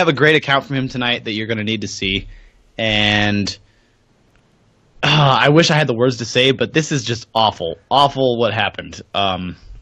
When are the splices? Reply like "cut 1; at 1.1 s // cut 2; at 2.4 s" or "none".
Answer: cut 1; at 1.0 s

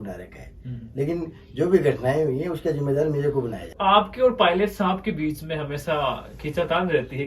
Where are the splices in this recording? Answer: cut 1; at 3.7 s

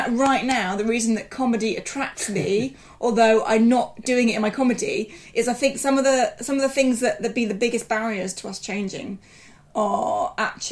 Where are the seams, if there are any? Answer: none

